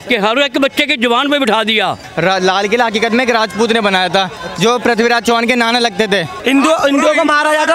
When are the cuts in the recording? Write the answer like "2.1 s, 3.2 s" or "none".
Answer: 2.0 s, 6.3 s